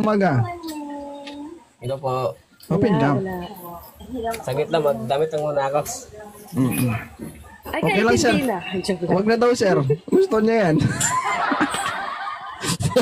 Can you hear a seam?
no; 0 cuts

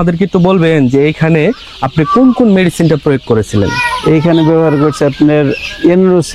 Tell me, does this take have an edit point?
no; 0 cuts

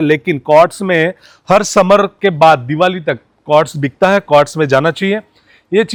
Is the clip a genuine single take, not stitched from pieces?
yes; 0 cuts

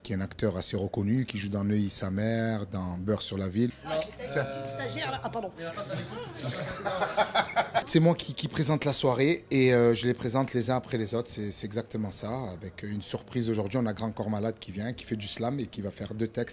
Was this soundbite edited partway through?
no; 0 cuts

